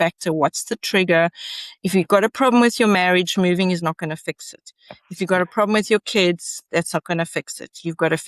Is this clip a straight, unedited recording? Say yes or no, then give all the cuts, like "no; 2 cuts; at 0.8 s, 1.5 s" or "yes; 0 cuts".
yes; 0 cuts